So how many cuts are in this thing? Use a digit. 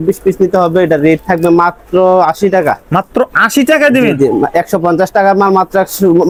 0